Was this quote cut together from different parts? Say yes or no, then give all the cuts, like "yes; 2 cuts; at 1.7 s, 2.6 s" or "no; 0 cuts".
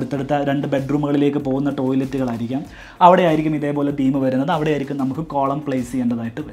no; 0 cuts